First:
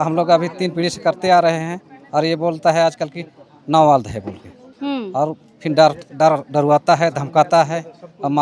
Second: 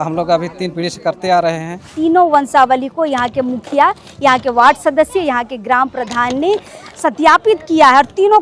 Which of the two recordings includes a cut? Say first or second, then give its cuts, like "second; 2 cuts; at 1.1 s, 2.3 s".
second; 1 cut; at 1.9 s